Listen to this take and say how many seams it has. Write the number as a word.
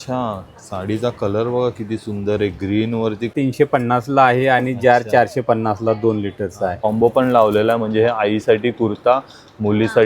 two